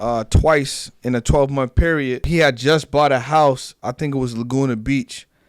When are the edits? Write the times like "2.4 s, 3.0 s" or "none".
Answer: 2.2 s

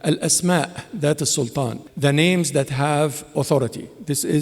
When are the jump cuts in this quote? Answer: 1.8 s

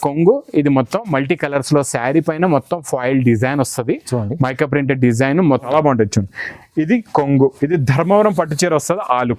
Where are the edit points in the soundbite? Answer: 5.7 s

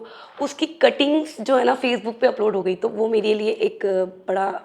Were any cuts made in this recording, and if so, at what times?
none

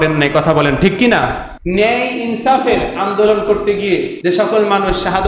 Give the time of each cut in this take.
1.5 s, 4.1 s

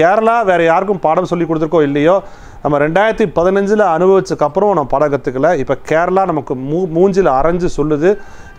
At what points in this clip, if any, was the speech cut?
none

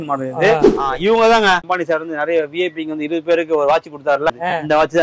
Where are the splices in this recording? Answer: 0.7 s, 1.6 s, 4.3 s

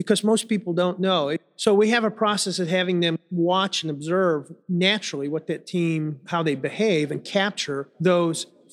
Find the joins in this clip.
1.5 s, 3.2 s, 4.5 s, 6.2 s, 7.8 s

